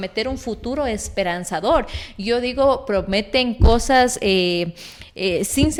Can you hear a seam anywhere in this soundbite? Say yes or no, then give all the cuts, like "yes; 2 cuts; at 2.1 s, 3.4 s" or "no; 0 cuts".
no; 0 cuts